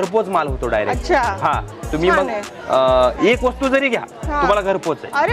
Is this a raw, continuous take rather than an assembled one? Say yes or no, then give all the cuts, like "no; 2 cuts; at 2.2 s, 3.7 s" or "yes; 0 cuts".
yes; 0 cuts